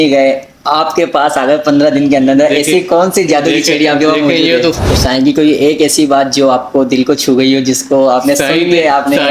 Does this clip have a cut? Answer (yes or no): yes